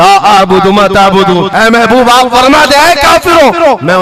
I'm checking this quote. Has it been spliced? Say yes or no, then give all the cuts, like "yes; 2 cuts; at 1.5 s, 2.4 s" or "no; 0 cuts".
no; 0 cuts